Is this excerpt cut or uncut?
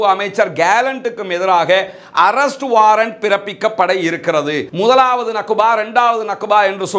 cut